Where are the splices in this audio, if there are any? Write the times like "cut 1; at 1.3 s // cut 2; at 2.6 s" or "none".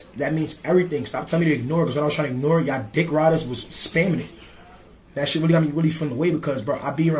cut 1; at 4.7 s